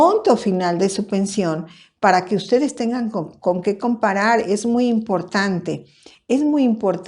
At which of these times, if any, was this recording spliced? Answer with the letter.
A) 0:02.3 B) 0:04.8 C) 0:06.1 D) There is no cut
C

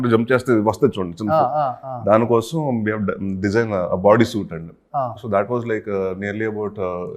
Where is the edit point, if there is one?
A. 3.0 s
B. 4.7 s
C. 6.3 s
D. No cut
D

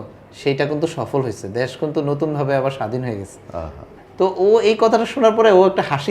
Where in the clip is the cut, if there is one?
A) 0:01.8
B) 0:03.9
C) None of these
B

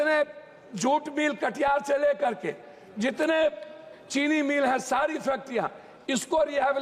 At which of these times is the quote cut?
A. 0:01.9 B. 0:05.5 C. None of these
C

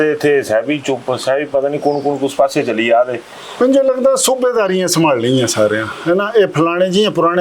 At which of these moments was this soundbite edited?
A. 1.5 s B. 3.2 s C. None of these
C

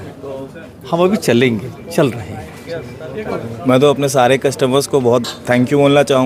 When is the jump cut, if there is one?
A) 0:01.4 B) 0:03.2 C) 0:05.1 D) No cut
B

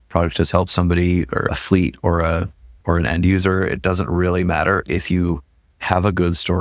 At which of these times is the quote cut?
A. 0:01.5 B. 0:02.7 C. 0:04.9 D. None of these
A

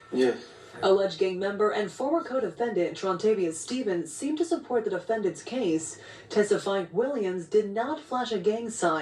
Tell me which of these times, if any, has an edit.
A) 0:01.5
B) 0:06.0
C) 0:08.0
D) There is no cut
C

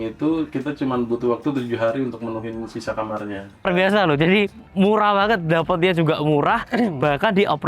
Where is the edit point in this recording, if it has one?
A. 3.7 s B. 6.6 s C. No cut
A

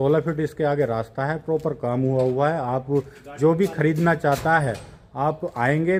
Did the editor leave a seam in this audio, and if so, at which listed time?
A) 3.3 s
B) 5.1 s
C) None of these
C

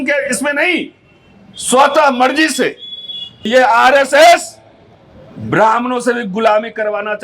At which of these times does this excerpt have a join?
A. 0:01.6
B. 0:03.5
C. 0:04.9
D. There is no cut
B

